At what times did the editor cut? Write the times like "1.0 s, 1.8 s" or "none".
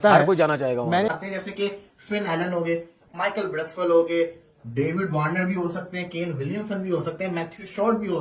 1.1 s